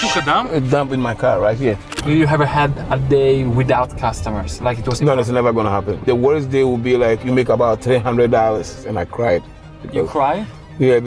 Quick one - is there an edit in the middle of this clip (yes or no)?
yes